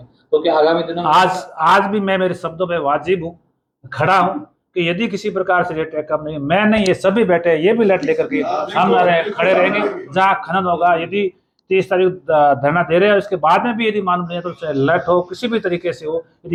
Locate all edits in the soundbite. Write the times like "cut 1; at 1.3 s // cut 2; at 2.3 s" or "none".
none

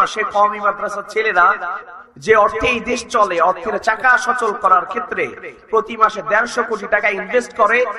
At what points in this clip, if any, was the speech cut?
cut 1; at 1.7 s

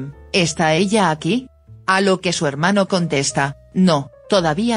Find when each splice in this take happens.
cut 1; at 1.1 s

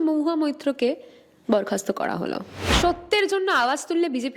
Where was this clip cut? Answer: cut 1; at 2.8 s

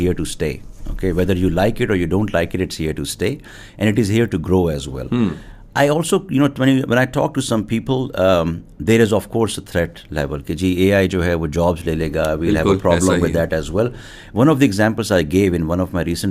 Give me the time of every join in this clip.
none

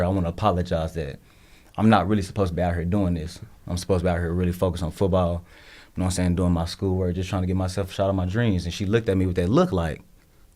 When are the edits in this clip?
none

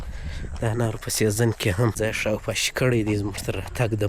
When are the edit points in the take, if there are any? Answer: cut 1; at 1.9 s

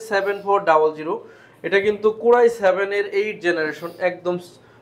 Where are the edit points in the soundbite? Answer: none

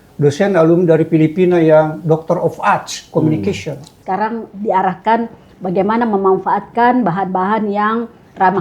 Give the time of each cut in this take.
cut 1; at 3.9 s

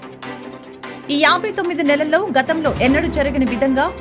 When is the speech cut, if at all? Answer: cut 1; at 1.0 s

